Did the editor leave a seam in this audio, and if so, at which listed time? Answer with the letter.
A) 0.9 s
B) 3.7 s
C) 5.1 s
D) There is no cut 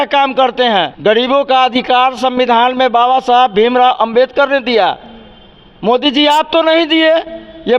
A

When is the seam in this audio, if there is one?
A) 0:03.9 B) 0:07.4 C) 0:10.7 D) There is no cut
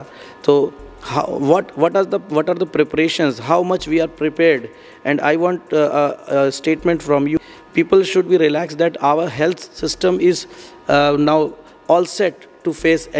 B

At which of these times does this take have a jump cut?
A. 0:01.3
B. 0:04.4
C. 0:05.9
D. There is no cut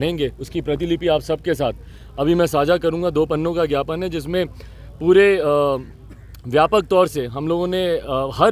D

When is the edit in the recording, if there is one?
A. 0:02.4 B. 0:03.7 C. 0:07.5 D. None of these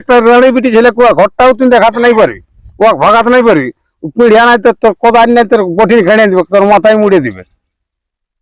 D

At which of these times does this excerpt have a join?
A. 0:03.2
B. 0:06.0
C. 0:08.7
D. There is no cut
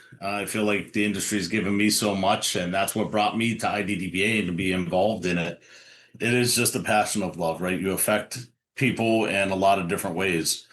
B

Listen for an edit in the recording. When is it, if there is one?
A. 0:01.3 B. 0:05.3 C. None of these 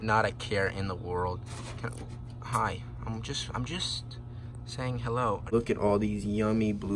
B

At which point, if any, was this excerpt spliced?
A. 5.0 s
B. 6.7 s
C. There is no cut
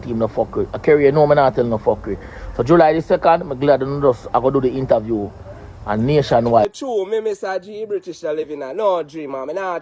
B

